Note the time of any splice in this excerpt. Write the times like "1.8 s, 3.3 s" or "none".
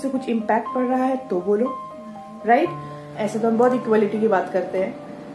3.2 s